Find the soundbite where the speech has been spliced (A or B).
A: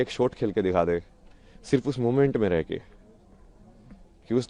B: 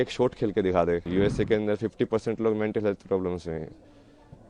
B